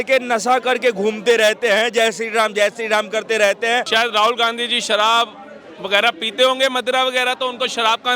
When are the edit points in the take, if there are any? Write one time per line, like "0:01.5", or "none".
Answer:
0:03.9